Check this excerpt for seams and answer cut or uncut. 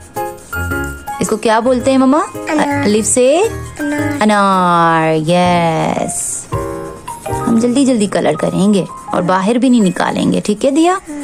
uncut